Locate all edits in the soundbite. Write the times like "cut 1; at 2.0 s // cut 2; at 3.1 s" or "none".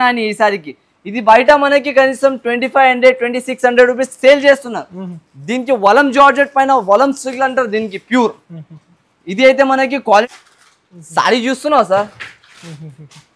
cut 1; at 10.3 s